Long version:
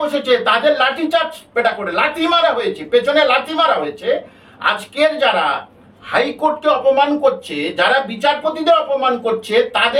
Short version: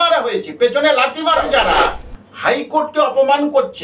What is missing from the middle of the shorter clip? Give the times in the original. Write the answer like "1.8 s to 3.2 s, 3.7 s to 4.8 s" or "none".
3.8 s to 5.2 s